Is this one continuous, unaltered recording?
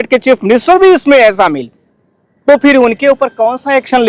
yes; 0 cuts

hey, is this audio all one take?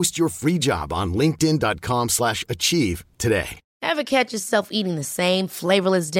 no; 1 cut; at 3.6 s

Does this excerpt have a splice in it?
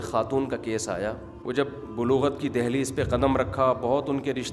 yes; 1 cut; at 1.3 s

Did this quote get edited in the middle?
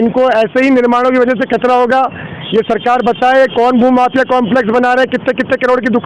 no; 0 cuts

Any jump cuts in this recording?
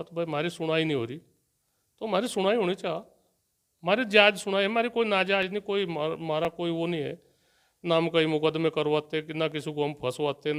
no; 0 cuts

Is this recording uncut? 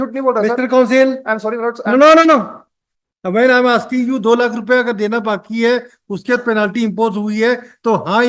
yes; 0 cuts

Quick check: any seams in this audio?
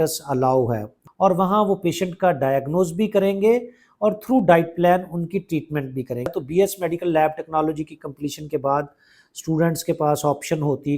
yes; 2 cuts; at 0.9 s, 6.3 s

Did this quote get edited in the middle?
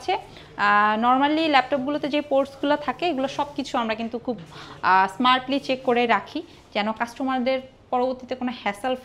no; 0 cuts

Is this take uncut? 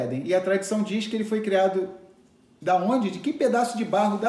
yes; 0 cuts

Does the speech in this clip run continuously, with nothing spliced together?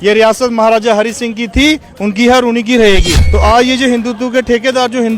no; 1 cut; at 3.2 s

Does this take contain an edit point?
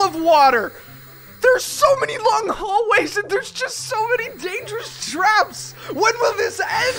no; 0 cuts

